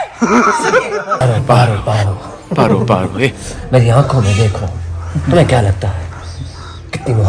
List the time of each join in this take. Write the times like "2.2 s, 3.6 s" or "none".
1.2 s